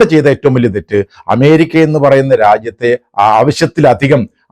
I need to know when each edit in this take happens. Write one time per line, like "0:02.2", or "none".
none